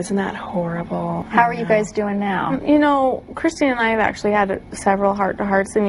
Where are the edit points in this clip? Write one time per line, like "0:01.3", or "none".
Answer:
0:01.2